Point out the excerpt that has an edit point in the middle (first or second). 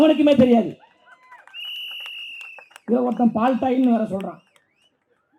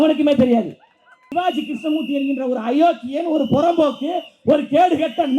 second